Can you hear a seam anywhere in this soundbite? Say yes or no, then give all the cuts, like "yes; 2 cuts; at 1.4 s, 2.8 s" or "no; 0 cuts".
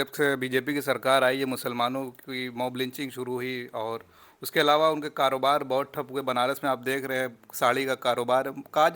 no; 0 cuts